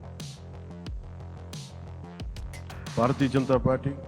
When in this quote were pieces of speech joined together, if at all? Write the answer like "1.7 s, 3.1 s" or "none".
none